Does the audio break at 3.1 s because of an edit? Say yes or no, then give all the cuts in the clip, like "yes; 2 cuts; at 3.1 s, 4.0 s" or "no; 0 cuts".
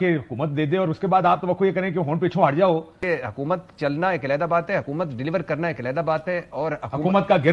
yes; 1 cut; at 3.1 s